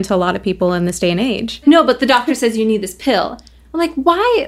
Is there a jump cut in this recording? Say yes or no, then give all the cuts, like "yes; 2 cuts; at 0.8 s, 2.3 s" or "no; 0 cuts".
yes; 1 cut; at 1.6 s